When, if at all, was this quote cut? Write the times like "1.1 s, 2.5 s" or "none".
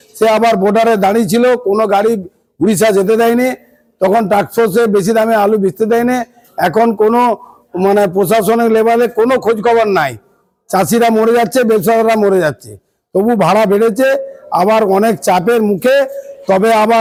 none